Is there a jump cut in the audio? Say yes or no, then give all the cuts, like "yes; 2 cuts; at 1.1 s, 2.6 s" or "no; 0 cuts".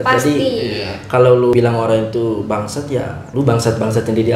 yes; 2 cuts; at 1.5 s, 3.2 s